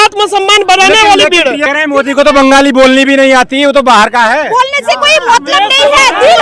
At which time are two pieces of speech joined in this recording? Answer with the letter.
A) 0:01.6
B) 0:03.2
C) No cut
A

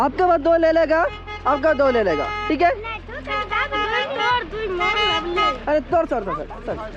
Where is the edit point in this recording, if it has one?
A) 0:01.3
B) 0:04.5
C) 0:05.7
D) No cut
D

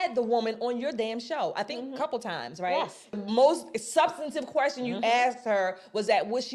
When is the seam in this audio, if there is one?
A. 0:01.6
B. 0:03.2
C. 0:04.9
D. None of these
B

